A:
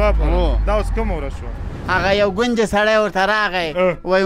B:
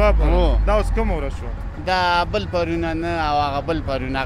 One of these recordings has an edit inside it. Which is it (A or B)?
A